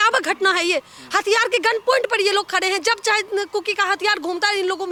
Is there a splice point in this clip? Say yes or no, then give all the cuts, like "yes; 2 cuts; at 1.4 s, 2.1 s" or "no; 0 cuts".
no; 0 cuts